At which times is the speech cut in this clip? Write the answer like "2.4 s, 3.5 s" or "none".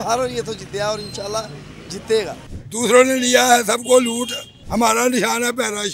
2.4 s

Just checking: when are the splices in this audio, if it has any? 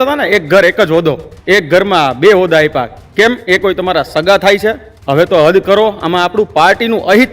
1.3 s, 3.0 s, 4.9 s

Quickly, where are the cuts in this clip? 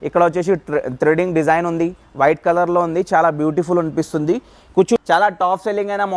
5.0 s

